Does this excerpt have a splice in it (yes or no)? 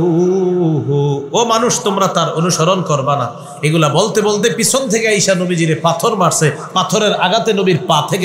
no